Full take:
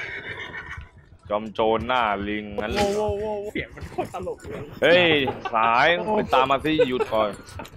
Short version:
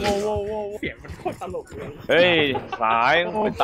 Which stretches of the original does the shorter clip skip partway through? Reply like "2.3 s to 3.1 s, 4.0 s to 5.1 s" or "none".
none

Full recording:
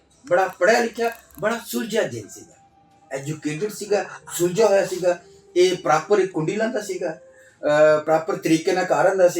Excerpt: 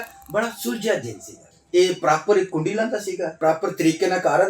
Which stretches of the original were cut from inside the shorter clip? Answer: 2.6 s to 5.3 s, 7.2 s to 8.0 s

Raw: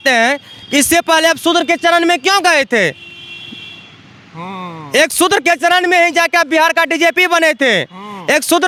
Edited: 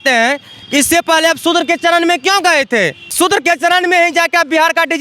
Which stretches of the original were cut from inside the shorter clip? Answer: 3.1 s to 5.1 s

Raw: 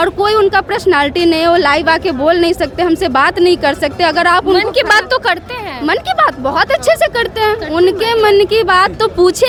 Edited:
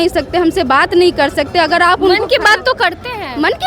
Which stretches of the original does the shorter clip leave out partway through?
none

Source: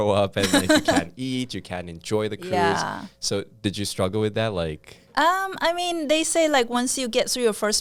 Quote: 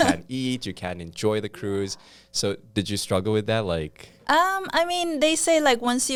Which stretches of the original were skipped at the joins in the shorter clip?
none

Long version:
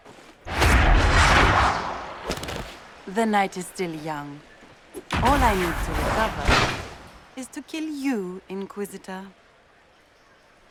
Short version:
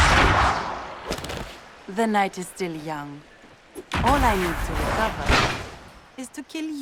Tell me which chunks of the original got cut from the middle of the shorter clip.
none

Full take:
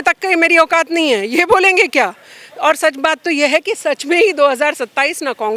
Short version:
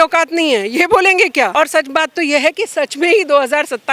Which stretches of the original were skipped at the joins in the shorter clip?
2.1 s to 2.6 s

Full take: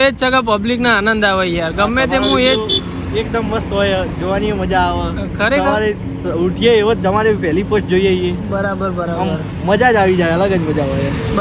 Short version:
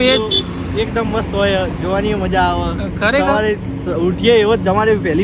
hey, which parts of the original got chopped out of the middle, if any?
none

